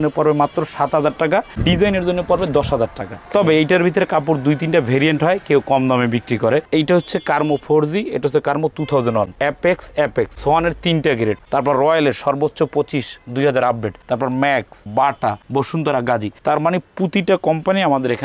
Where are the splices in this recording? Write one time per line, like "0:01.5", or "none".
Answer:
0:06.7
0:09.3
0:10.3
0:11.4